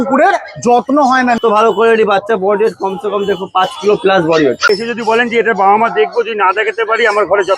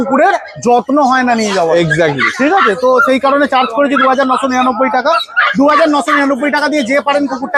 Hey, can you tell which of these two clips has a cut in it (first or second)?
first